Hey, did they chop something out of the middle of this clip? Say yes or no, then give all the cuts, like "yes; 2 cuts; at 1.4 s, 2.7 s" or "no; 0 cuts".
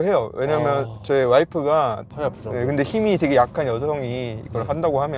yes; 1 cut; at 2.0 s